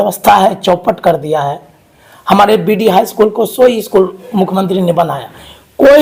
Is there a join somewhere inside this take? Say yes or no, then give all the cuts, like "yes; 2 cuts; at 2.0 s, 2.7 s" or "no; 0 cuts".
no; 0 cuts